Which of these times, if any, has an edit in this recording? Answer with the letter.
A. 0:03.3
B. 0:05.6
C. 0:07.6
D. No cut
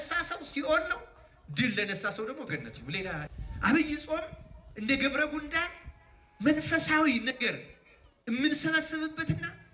A